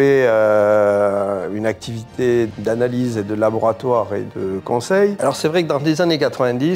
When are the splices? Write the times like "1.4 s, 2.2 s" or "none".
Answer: 2.5 s, 5.2 s